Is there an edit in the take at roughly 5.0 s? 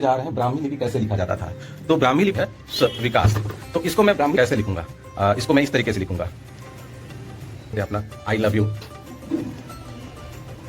no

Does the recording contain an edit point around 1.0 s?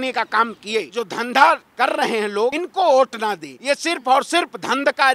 yes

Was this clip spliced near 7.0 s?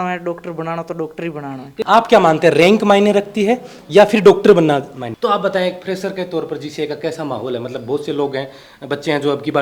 no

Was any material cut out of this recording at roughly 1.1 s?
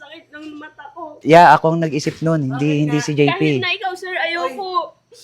yes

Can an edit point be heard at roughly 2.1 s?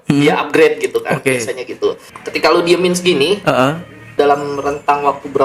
yes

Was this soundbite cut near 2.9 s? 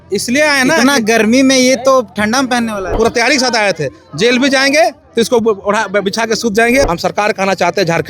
yes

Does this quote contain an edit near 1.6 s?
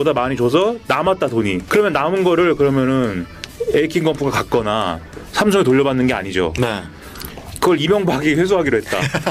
yes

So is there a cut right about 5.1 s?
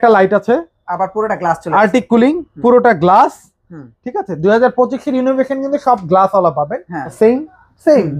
no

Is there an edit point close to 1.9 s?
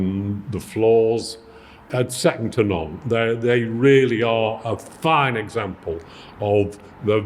yes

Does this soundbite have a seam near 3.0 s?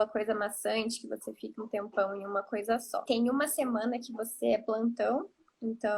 yes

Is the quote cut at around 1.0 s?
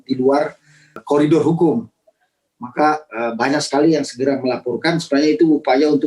yes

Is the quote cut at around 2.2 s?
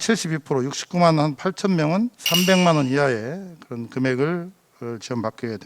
yes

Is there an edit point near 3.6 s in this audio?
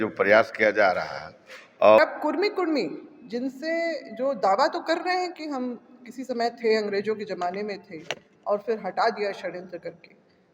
no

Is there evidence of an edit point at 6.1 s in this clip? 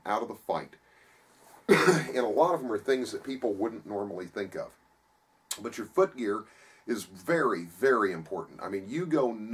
yes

